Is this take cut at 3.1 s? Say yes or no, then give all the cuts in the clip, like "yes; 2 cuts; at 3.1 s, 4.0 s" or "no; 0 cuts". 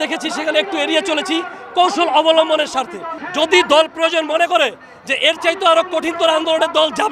yes; 1 cut; at 3.1 s